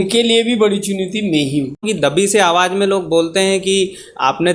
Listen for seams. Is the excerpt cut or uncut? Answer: cut